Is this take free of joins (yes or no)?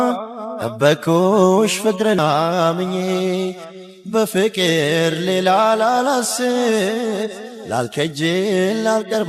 yes